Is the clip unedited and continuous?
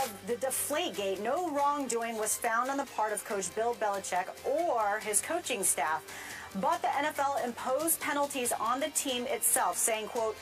no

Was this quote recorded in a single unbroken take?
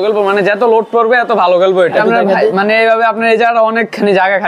no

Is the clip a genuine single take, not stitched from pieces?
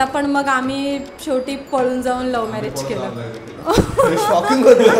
yes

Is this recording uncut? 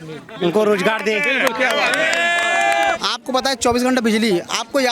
no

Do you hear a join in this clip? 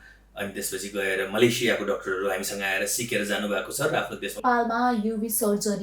yes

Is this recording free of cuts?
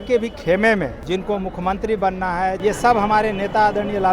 no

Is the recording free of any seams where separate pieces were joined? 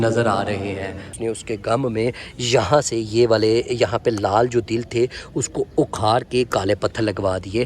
no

